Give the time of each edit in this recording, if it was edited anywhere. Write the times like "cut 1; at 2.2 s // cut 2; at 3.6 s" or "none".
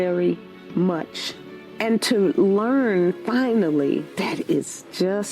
cut 1; at 4.1 s